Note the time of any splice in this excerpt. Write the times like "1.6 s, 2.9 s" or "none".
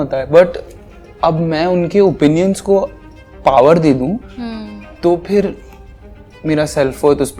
none